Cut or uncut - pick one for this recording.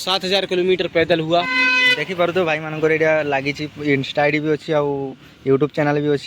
cut